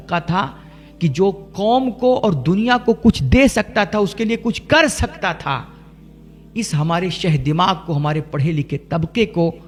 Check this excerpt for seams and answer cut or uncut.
uncut